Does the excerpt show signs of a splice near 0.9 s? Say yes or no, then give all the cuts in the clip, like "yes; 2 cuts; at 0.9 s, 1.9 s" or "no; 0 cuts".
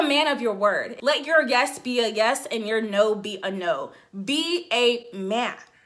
yes; 1 cut; at 0.9 s